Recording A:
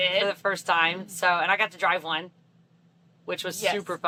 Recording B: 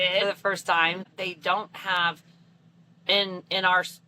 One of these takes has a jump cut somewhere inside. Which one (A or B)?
B